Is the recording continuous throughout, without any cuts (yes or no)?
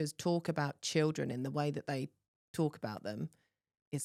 yes